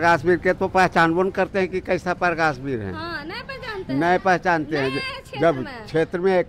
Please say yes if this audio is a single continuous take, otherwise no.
yes